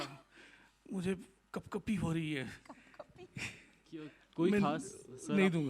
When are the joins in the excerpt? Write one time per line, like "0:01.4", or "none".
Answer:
none